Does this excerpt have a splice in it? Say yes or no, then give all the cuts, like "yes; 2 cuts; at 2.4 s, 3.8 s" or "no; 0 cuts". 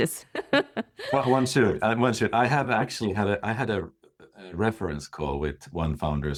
no; 0 cuts